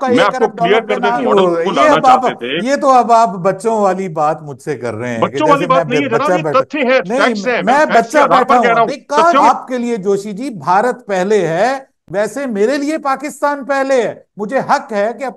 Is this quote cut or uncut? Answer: cut